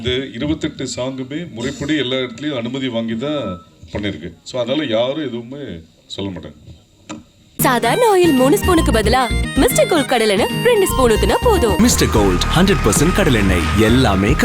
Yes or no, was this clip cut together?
yes